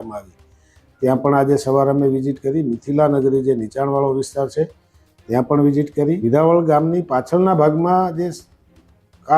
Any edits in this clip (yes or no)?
yes